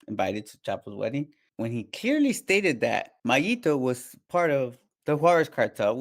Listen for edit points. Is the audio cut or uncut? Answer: cut